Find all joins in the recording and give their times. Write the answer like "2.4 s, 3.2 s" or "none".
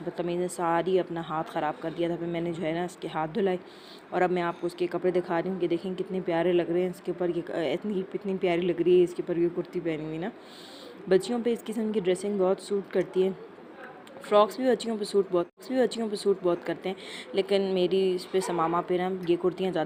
none